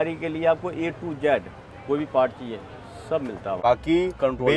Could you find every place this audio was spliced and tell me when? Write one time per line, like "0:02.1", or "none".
0:03.6